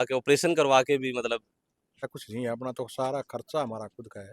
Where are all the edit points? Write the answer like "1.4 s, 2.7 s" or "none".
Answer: 2.1 s

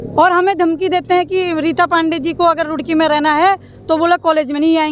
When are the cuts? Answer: none

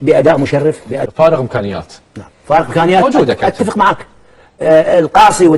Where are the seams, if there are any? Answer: 1.0 s

